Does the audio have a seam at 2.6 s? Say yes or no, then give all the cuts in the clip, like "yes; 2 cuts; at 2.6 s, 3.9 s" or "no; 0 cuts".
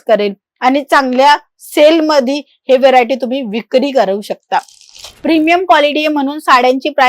no; 1 cut; at 5.1 s